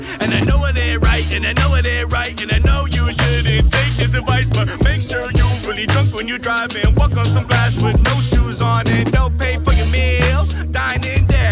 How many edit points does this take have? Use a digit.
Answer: 0